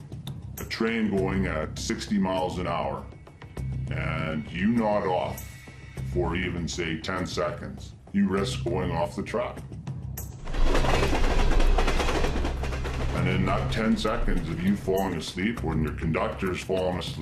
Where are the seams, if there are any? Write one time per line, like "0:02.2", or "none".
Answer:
none

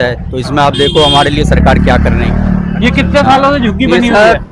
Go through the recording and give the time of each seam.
none

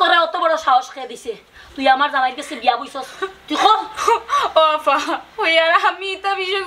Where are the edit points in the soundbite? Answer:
none

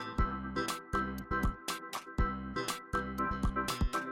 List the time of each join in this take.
none

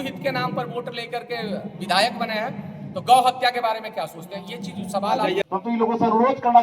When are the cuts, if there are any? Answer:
0:05.4

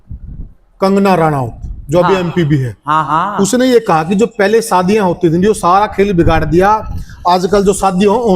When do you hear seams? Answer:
none

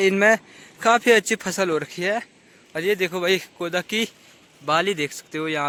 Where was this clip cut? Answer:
none

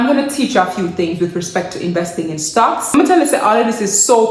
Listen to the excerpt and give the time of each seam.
0:02.9

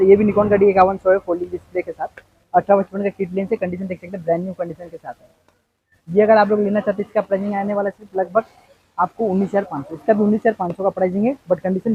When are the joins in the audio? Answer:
none

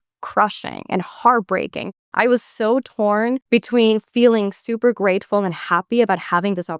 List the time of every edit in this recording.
0:02.0
0:03.4

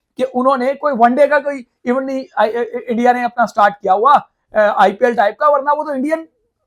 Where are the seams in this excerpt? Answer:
none

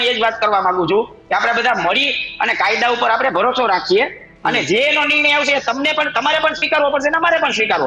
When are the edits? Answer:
none

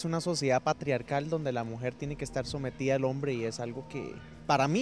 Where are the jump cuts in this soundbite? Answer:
none

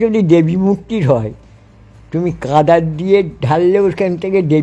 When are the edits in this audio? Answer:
none

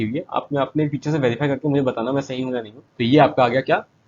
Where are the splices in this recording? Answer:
0:02.9

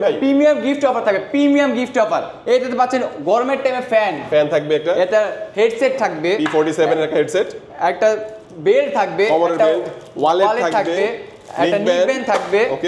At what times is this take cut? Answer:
none

